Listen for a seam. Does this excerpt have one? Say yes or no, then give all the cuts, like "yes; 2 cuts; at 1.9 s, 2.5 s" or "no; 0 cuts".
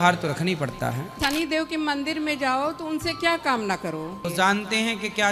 yes; 2 cuts; at 1.1 s, 4.3 s